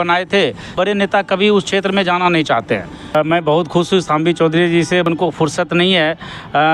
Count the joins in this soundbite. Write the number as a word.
three